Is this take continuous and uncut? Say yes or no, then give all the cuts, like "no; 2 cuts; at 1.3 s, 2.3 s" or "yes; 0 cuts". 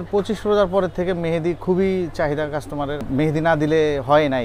no; 1 cut; at 3.0 s